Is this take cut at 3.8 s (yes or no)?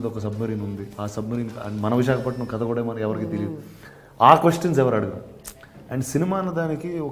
no